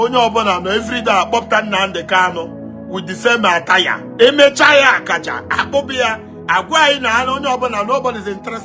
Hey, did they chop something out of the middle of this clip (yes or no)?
yes